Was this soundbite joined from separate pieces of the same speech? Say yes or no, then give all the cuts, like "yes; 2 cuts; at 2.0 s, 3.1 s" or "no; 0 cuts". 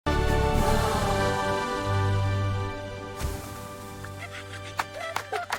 no; 0 cuts